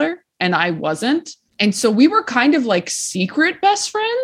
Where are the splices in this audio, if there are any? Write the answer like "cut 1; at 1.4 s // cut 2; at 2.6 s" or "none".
cut 1; at 1.4 s